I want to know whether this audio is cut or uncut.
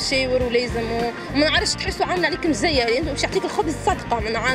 uncut